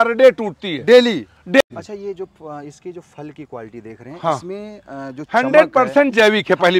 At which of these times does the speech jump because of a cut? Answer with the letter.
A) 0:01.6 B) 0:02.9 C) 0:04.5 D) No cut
A